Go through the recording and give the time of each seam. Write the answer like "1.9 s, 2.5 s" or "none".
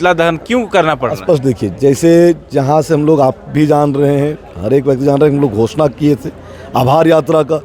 none